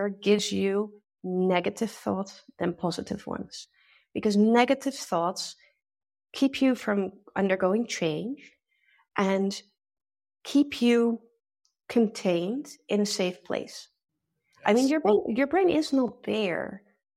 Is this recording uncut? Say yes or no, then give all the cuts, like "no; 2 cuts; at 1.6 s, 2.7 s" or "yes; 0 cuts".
yes; 0 cuts